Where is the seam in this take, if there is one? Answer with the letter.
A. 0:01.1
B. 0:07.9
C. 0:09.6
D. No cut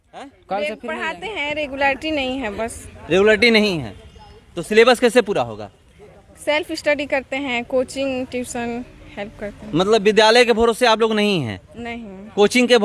A